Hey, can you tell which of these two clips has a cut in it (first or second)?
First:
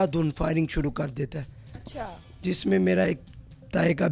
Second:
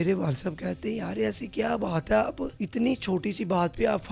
second